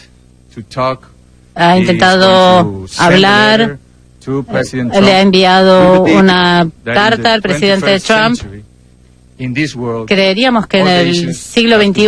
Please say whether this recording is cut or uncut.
cut